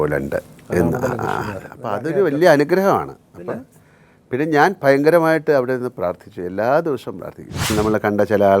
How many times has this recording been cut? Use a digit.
1